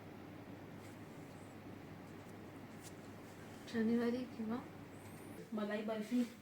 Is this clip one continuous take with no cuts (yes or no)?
no